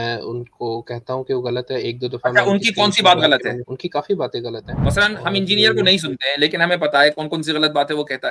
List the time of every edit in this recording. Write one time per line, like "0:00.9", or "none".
0:03.7
0:04.7

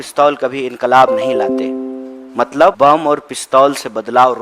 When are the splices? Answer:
0:02.8

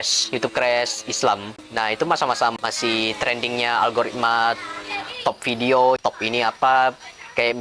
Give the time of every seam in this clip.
none

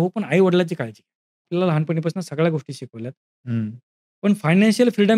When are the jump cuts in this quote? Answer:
0:01.5

